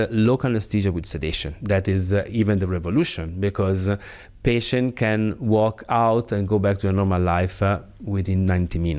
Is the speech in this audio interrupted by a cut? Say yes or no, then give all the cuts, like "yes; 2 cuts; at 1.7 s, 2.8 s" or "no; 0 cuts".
no; 0 cuts